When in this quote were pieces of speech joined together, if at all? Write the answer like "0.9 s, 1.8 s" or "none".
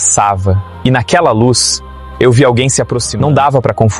3.0 s